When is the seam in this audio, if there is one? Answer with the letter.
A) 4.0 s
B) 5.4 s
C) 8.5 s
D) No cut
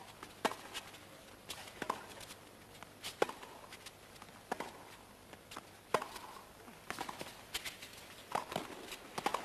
C